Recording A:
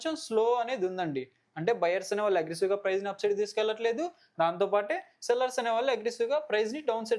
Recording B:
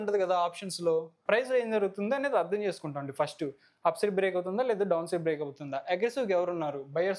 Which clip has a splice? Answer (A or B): B